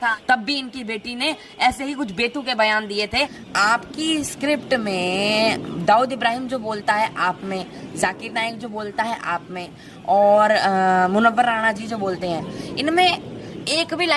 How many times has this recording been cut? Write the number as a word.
one